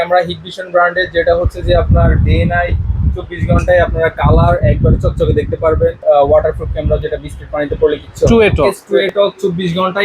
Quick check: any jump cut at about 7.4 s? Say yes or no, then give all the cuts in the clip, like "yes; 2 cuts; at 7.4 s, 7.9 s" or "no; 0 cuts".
no; 2 cuts; at 6.0 s, 8.8 s